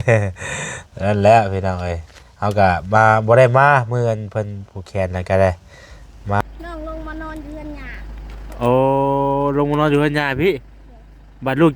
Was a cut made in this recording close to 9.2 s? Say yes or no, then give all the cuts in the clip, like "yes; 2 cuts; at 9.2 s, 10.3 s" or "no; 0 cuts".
no; 1 cut; at 6.4 s